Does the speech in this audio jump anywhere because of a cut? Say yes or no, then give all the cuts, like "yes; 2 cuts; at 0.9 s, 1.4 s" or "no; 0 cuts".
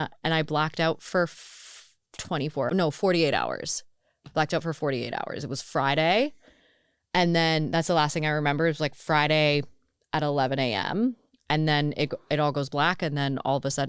yes; 1 cut; at 2.7 s